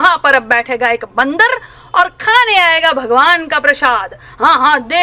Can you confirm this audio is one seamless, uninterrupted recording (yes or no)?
yes